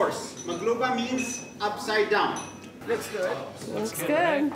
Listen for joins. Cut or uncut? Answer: cut